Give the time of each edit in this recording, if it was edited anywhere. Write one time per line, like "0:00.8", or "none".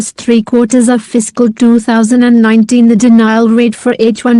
0:02.8